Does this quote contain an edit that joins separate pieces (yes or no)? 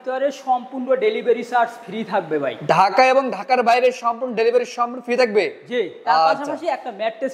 no